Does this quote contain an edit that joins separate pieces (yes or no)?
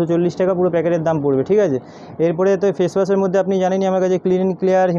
no